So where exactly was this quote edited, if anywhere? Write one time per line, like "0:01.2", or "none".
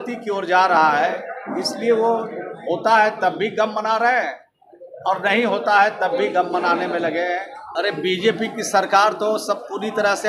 0:07.6